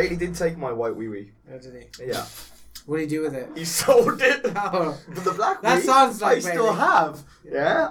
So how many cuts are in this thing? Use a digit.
1